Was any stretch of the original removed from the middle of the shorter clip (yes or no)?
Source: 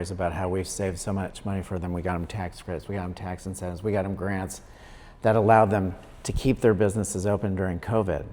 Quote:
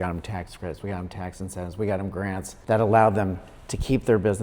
yes